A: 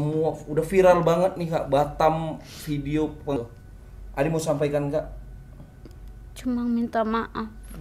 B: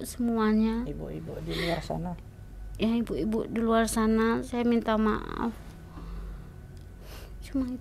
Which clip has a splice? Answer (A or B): A